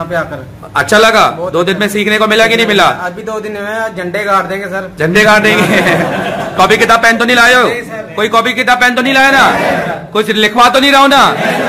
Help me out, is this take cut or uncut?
uncut